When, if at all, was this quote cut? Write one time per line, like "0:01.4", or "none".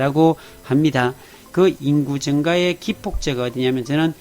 0:01.4

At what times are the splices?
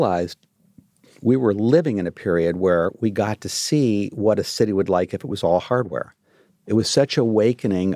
0:06.6

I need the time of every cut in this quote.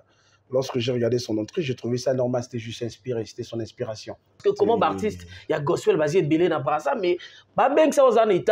0:04.3

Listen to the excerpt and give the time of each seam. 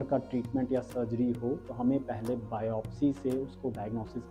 none

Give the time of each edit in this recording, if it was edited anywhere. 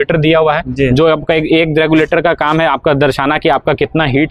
none

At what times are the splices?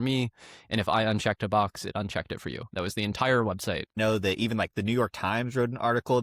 0:04.0

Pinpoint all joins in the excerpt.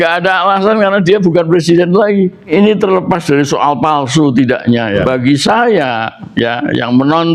0:02.5
0:05.0

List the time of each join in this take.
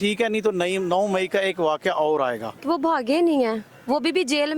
0:02.5

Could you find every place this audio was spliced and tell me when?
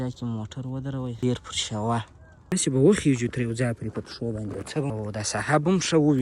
0:01.2
0:02.5
0:04.9

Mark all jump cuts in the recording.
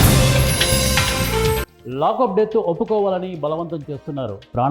0:01.6

